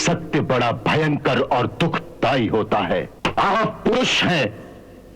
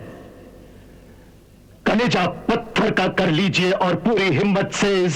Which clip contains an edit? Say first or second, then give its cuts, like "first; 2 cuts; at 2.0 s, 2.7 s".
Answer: first; 1 cut; at 3.1 s